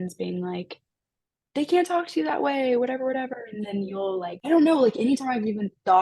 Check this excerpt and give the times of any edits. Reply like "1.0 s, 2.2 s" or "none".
4.4 s